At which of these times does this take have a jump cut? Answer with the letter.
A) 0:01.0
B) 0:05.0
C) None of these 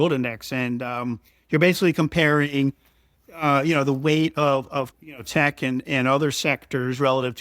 B